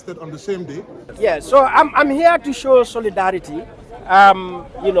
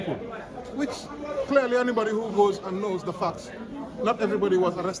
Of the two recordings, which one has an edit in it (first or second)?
first